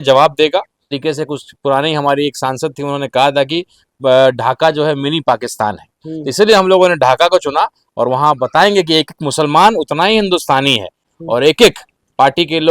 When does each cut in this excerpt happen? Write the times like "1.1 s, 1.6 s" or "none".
1.0 s, 11.1 s